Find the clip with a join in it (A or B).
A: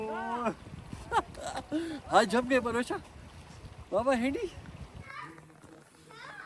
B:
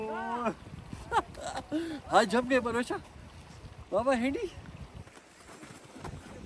A